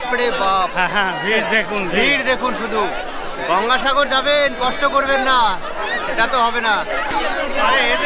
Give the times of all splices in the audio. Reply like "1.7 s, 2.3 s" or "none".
7.1 s